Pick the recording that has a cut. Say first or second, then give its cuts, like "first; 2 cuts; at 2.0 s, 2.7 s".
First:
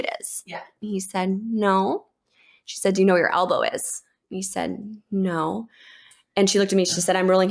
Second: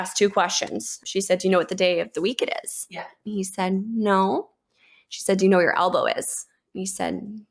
second; 1 cut; at 0.9 s